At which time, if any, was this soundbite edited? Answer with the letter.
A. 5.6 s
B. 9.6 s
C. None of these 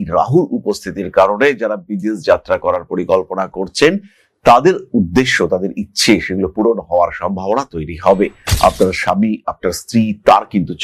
C